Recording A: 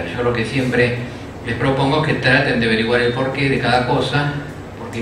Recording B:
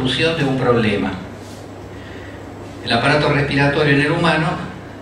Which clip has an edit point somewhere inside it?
A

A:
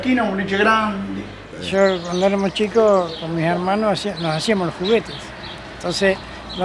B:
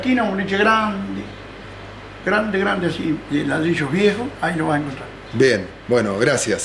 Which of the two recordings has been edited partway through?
A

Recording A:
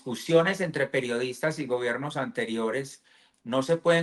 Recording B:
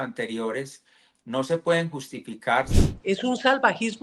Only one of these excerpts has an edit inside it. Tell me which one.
B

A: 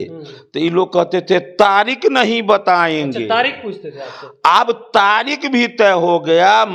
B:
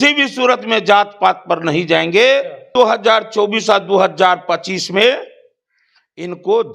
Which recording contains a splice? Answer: B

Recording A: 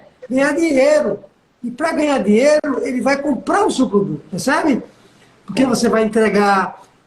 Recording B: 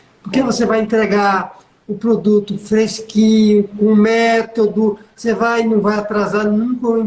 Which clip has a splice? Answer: A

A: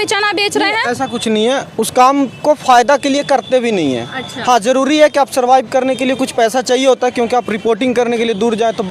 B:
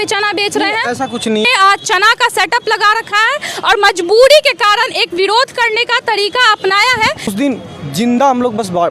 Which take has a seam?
B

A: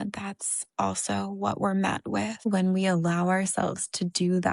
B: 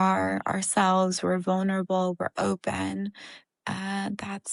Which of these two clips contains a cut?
A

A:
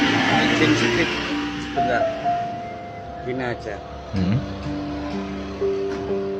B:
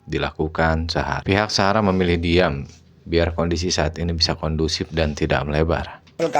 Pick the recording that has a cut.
B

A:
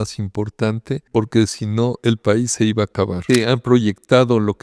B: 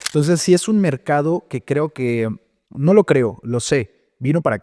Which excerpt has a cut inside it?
A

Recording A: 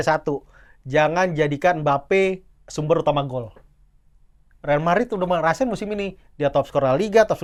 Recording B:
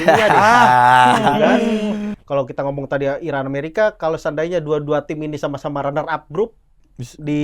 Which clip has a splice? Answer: B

